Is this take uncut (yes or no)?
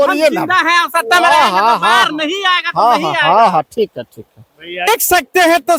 yes